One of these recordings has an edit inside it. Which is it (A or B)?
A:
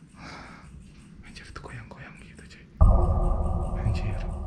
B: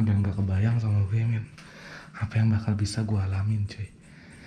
A